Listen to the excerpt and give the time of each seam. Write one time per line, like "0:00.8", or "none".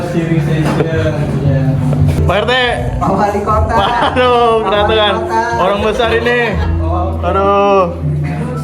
0:02.2